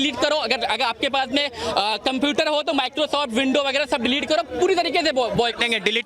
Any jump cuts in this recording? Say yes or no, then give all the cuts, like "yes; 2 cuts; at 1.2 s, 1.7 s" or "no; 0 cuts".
no; 0 cuts